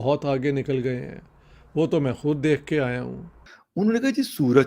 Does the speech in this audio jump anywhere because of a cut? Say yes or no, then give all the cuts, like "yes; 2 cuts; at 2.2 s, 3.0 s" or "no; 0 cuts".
yes; 1 cut; at 3.5 s